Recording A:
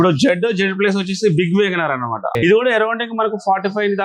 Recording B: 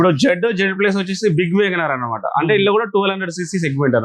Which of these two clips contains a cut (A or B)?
A